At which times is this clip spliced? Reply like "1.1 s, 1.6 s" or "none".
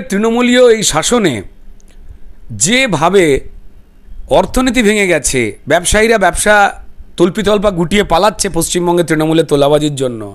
none